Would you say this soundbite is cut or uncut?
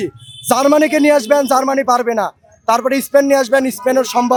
uncut